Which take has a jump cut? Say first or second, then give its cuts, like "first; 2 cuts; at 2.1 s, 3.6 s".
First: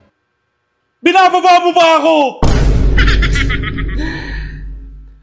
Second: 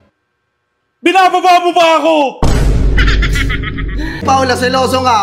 second; 1 cut; at 4.2 s